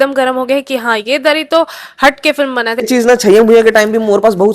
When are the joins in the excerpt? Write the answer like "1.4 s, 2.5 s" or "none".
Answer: 2.9 s

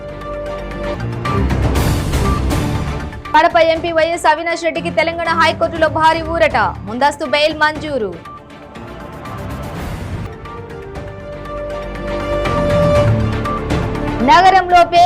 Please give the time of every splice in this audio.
0.9 s

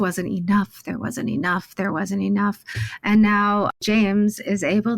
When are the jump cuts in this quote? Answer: 3.8 s

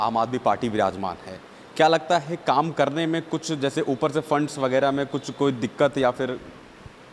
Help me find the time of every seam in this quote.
none

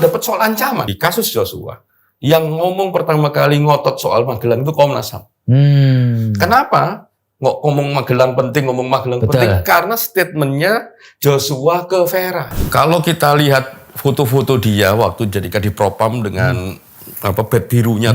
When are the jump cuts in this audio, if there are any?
0.9 s, 12.5 s

